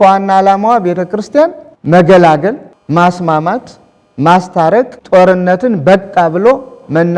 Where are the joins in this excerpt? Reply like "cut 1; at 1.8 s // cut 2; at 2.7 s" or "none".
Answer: cut 1; at 1.7 s // cut 2; at 2.7 s // cut 3; at 5.0 s